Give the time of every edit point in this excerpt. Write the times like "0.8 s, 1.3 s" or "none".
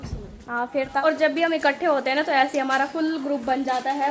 1.0 s